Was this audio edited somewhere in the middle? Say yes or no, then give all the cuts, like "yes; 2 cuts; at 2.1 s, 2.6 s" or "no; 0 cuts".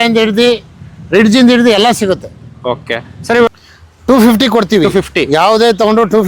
yes; 1 cut; at 3.5 s